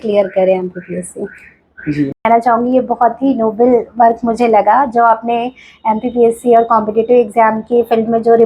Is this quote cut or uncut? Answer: cut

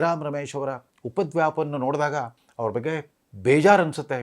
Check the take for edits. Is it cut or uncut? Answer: cut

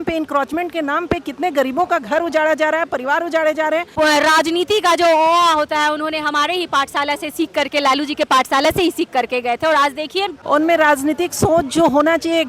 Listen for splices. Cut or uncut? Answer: cut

